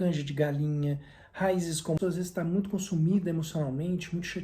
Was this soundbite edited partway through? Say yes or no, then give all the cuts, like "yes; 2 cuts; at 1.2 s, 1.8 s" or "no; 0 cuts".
yes; 1 cut; at 2.0 s